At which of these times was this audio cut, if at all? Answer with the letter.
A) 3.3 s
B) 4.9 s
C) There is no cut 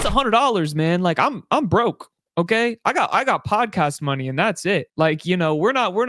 B